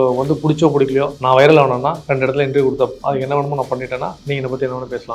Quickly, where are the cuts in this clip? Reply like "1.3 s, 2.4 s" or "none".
1.1 s, 2.0 s, 3.0 s, 4.2 s

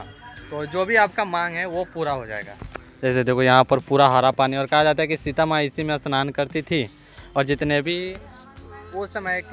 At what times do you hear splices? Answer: none

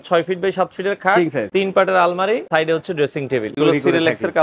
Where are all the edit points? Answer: 1.5 s, 2.5 s, 3.5 s

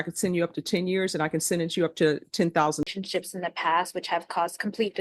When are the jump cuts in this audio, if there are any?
2.9 s

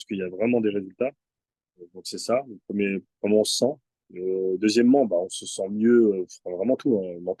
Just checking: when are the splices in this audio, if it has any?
none

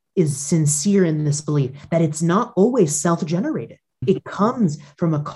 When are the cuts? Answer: 4.0 s

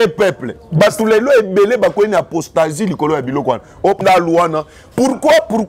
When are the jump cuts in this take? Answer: 4.0 s

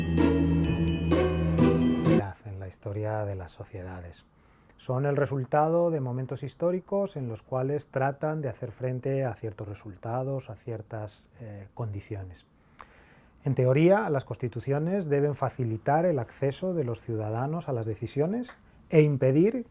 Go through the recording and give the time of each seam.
none

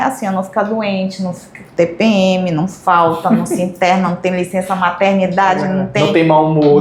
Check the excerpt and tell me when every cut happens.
none

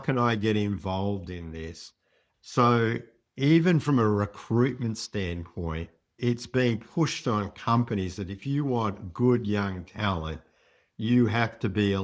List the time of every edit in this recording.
none

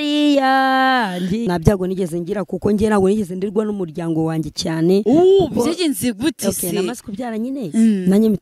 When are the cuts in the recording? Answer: 1.5 s

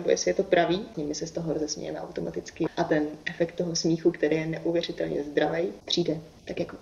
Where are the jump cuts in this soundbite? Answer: 0.9 s, 2.7 s, 5.8 s

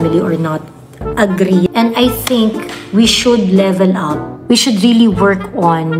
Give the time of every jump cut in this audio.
1.7 s

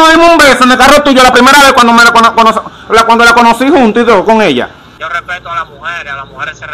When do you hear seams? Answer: 4.8 s

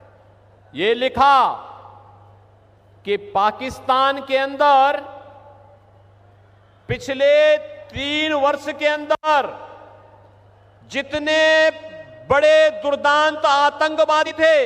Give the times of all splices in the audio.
none

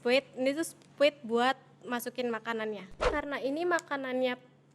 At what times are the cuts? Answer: 3.0 s

